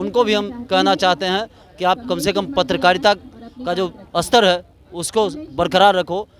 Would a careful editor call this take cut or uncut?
uncut